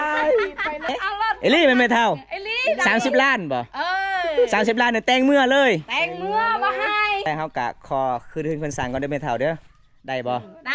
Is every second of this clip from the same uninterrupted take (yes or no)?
no